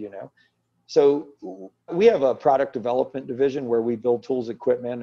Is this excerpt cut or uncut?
cut